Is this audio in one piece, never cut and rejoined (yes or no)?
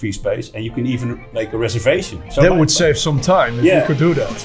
no